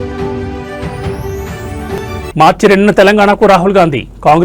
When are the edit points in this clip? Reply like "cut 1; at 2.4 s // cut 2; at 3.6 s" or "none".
none